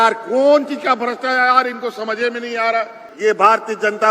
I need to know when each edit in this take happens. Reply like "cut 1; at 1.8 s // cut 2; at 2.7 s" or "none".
cut 1; at 3.0 s